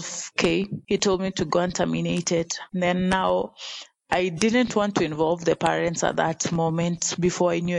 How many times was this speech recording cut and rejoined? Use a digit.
0